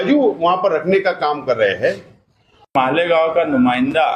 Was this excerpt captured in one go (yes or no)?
no